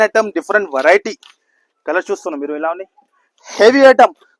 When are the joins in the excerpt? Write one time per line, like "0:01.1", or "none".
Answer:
none